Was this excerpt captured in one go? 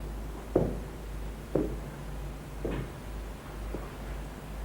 yes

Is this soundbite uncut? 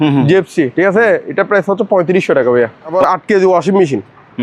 no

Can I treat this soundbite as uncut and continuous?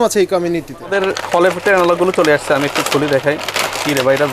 no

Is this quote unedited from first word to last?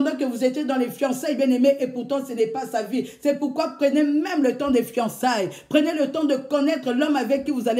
yes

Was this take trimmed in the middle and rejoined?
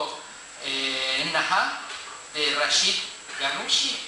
no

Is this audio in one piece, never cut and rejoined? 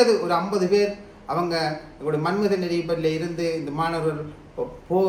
yes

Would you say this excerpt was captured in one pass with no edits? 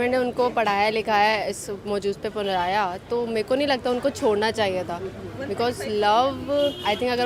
yes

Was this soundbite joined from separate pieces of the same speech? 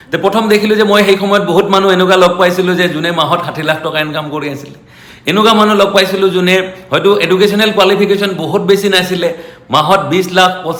no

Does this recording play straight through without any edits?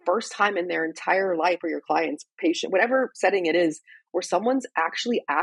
no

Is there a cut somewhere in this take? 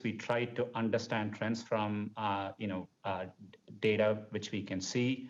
no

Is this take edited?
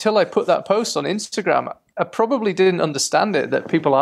no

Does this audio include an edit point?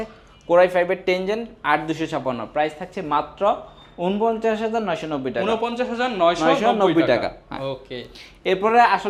no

